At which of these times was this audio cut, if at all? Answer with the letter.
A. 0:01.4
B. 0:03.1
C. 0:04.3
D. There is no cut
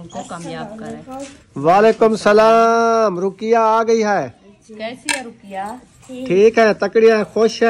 A